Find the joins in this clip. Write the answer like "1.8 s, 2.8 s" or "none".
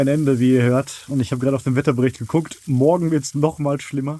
none